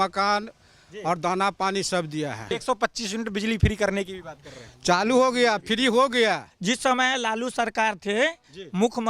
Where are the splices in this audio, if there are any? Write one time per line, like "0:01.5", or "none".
0:02.5
0:06.5